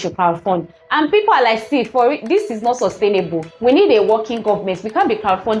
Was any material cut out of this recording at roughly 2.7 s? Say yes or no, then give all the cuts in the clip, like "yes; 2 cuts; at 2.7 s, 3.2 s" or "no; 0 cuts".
no; 0 cuts